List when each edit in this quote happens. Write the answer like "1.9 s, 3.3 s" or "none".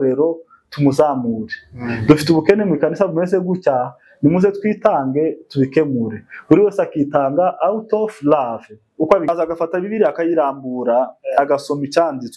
9.3 s

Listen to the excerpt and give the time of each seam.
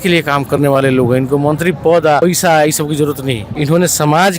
2.2 s, 3.5 s

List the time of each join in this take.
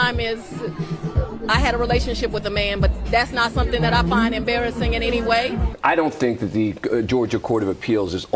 5.7 s

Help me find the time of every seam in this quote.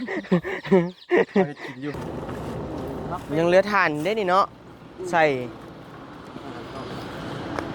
2.0 s

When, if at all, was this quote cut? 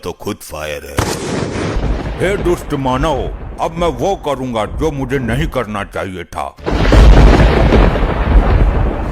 1.8 s, 6.5 s

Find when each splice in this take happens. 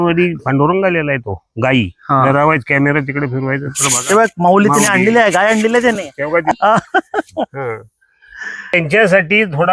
6.6 s, 8.7 s

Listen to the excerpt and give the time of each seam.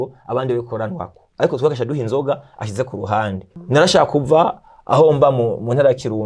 3.5 s

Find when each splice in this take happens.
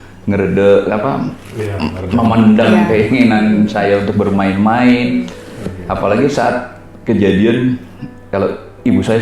none

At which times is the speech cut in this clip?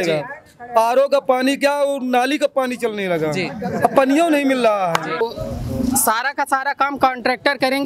5.2 s

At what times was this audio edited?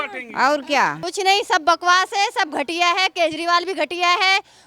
1.0 s

